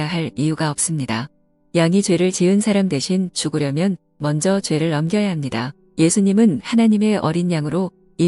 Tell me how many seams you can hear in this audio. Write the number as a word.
one